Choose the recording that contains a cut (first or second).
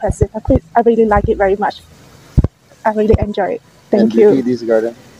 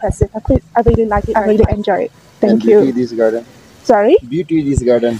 second